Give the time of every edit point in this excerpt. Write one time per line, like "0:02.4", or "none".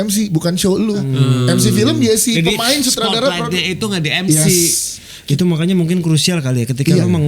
0:01.1